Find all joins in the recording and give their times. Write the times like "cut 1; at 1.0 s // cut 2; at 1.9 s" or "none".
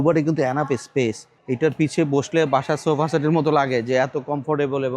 cut 1; at 1.3 s